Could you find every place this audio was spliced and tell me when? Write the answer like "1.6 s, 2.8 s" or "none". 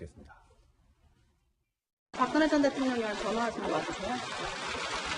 2.7 s